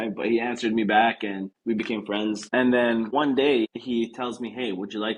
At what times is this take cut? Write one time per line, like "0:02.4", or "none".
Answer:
0:01.5
0:02.4
0:03.1
0:03.7